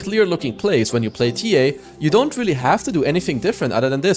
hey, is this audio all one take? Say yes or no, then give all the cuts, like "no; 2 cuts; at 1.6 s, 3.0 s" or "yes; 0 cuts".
yes; 0 cuts